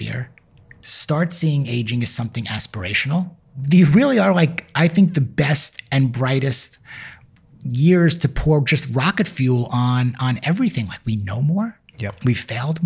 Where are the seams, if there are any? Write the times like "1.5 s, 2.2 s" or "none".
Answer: 3.5 s